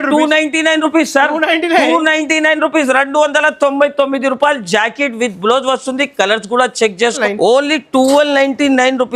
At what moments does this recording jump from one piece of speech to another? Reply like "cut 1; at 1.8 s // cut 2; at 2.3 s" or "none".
cut 1; at 7.2 s